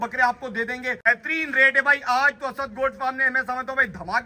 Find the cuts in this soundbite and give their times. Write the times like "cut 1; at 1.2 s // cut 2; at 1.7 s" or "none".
cut 1; at 1.0 s